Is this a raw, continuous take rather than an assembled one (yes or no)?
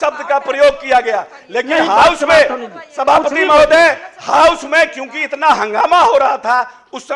yes